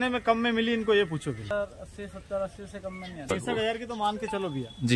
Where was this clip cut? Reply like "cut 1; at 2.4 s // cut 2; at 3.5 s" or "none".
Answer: cut 1; at 1.4 s // cut 2; at 3.2 s

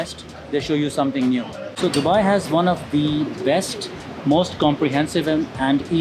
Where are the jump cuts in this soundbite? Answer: cut 1; at 1.6 s

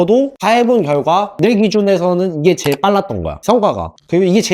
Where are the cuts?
none

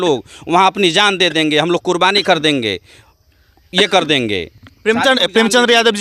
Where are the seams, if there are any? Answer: none

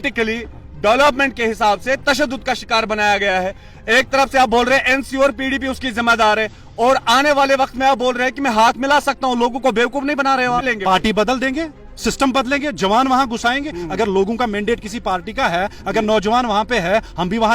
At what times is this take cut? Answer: cut 1; at 10.6 s

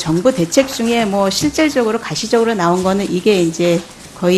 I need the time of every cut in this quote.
cut 1; at 2.3 s

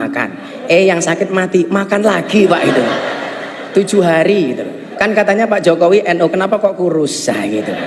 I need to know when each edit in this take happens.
cut 1; at 4.8 s

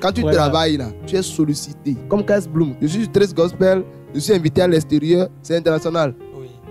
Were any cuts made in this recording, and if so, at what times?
cut 1; at 0.9 s // cut 2; at 2.0 s // cut 3; at 2.7 s

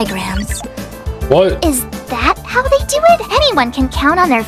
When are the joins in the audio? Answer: cut 1; at 3.3 s

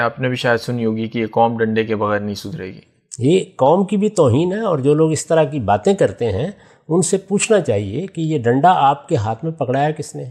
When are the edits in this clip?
none

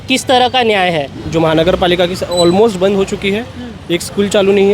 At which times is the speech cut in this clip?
cut 1; at 1.2 s

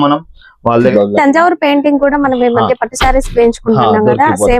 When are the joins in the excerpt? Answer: cut 1; at 0.9 s

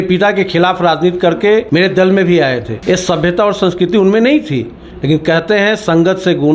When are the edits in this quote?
cut 1; at 1.7 s // cut 2; at 2.7 s

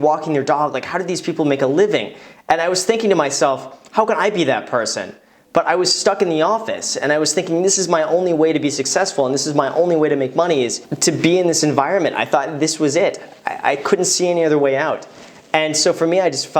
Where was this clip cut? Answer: cut 1; at 10.9 s

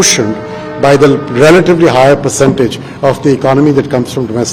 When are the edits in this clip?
none

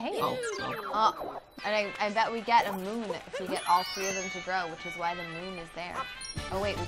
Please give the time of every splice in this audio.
cut 1; at 1.5 s

